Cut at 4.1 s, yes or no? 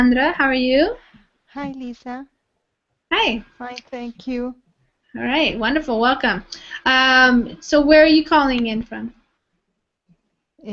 no